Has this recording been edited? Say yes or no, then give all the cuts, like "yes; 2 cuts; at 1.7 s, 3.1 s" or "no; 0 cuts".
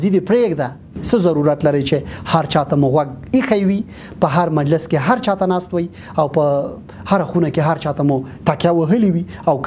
yes; 1 cut; at 1.0 s